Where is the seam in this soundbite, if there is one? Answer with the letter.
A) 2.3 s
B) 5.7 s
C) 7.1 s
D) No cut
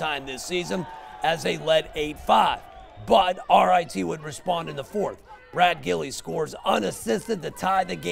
D